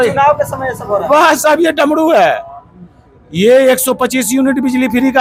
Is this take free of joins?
yes; 0 cuts

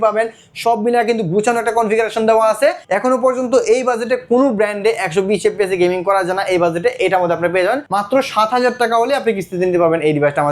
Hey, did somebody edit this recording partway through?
yes; 2 cuts; at 2.8 s, 7.8 s

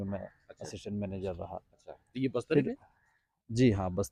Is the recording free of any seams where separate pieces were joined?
yes; 0 cuts

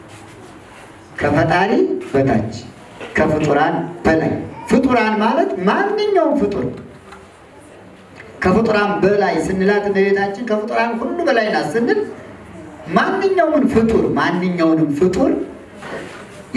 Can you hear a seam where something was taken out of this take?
no; 0 cuts

